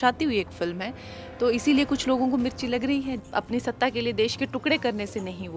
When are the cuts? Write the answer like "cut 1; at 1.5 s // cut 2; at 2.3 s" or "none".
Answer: cut 1; at 3.2 s